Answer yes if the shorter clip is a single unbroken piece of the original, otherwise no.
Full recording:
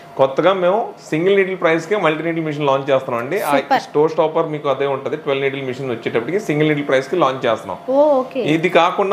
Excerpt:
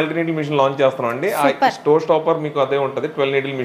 yes